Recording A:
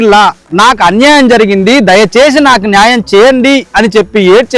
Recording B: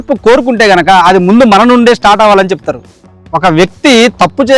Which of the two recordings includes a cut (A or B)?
B